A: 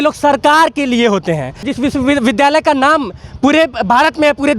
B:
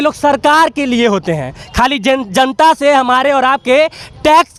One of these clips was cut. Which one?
A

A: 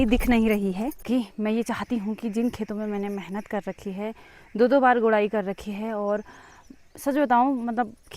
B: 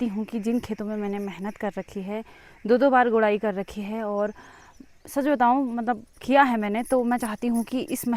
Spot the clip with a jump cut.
A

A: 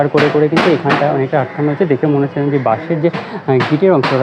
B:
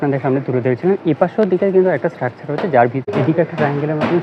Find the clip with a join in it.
B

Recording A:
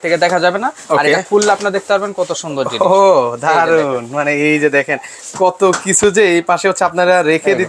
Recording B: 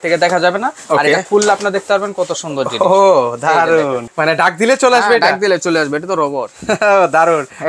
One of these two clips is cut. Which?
B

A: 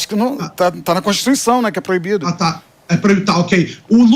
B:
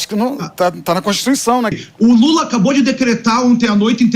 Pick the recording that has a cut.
B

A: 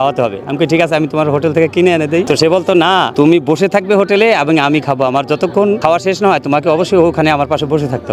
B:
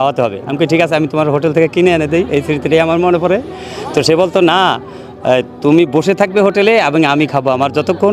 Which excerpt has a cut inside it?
A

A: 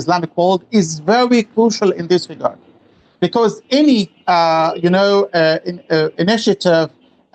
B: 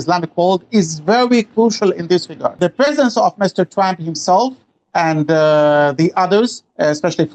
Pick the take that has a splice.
B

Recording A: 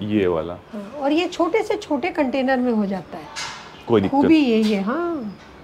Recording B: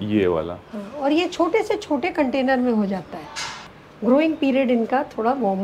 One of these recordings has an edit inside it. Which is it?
B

